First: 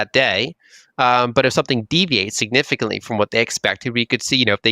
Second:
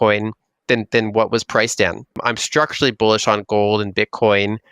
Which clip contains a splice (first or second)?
second